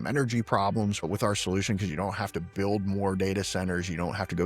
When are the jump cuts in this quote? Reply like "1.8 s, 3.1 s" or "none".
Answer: 1.0 s